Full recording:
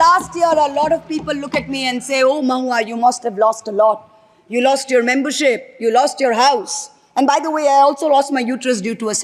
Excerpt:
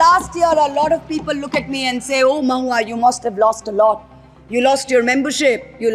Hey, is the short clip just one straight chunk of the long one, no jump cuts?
yes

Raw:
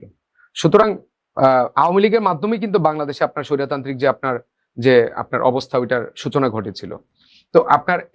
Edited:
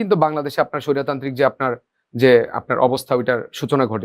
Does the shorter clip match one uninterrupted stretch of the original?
yes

